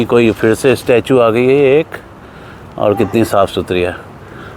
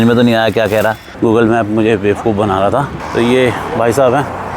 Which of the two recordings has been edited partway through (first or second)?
second